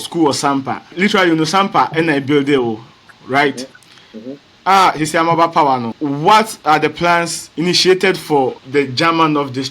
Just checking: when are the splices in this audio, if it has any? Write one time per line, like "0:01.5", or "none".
0:00.9
0:05.9
0:07.4
0:08.6